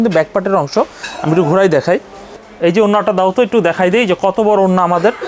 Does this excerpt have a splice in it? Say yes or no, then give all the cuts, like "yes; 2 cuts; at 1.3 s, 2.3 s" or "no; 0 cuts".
yes; 1 cut; at 2.4 s